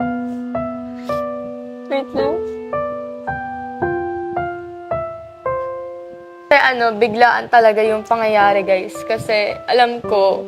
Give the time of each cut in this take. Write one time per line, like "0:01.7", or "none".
0:06.5